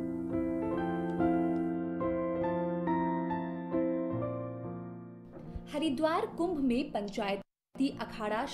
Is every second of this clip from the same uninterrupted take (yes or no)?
yes